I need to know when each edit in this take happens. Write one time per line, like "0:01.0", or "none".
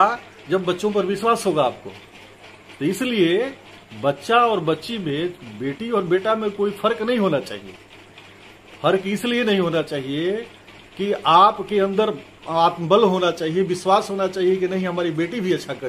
none